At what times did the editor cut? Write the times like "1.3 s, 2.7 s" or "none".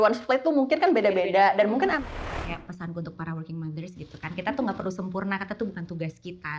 2.3 s